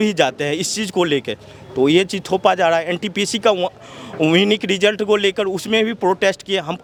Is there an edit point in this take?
no; 0 cuts

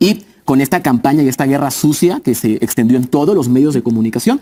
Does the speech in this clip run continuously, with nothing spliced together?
yes; 0 cuts

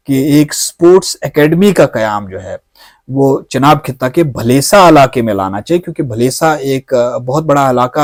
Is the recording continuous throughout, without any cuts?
yes; 0 cuts

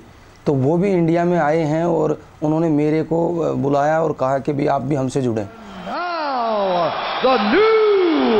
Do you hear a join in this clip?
no; 0 cuts

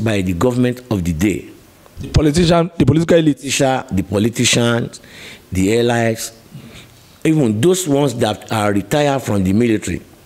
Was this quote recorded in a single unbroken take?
yes; 0 cuts

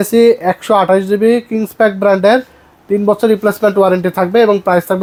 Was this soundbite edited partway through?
no; 0 cuts

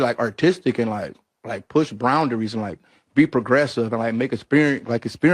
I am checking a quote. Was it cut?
no; 0 cuts

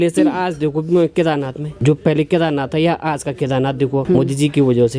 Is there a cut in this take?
yes; 2 cuts; at 1.8 s, 4.0 s

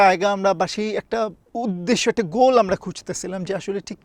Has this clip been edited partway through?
yes; 1 cut; at 1.4 s

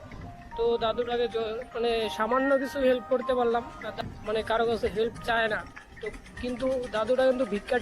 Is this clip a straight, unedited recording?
no; 1 cut; at 4.0 s

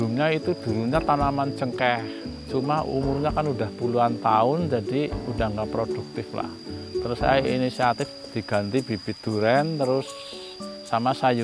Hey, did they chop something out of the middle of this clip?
yes; 1 cut; at 8.2 s

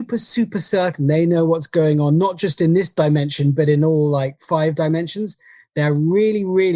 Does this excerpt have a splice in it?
no; 0 cuts

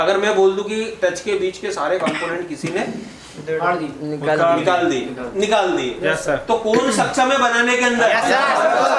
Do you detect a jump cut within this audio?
no; 0 cuts

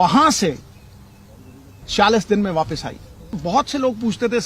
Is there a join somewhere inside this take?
yes; 1 cut; at 3.4 s

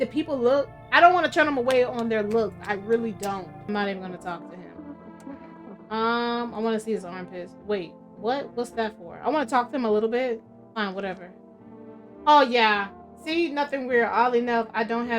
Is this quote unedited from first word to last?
no; 1 cut; at 3.5 s

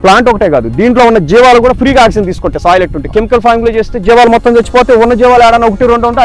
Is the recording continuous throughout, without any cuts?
yes; 0 cuts

